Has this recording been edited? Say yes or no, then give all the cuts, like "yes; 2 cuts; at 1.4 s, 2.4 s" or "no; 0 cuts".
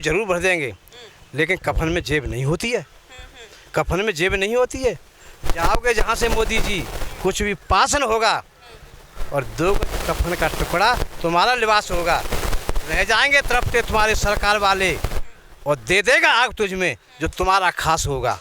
no; 0 cuts